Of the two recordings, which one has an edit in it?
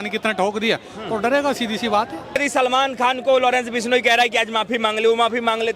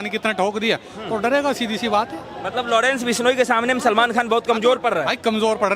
first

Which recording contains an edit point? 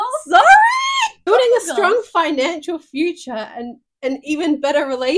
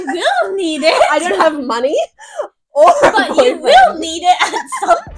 first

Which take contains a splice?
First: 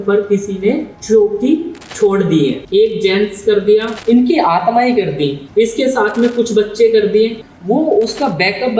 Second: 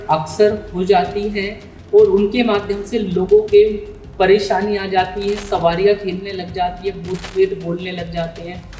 first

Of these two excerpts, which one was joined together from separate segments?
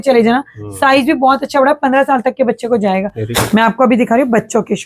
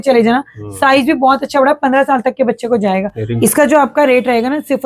second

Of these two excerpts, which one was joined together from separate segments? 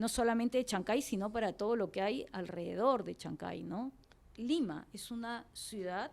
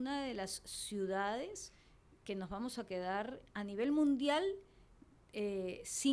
first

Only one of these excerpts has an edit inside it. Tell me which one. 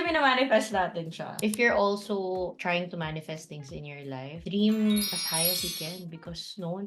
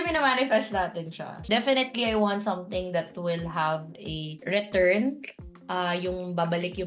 first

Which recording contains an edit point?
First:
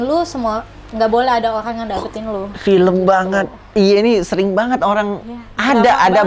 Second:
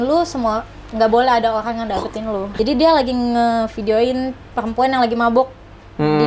second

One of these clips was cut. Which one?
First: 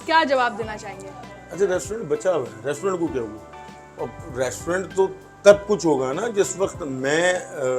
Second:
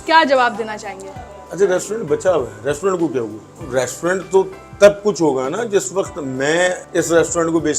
second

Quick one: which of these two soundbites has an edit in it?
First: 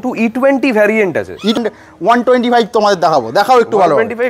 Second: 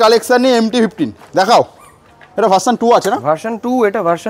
first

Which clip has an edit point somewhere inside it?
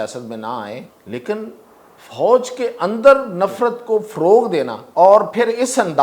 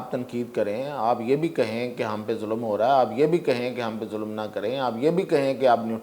first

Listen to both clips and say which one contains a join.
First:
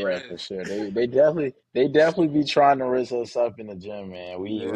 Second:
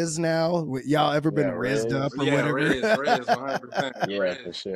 first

